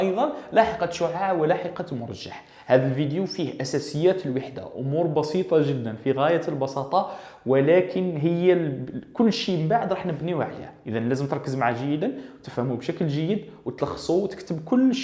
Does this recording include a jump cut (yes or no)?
no